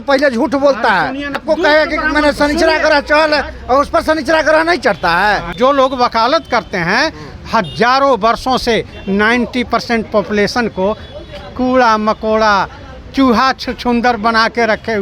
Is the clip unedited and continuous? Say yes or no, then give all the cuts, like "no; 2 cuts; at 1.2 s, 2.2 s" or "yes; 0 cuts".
no; 2 cuts; at 1.4 s, 5.5 s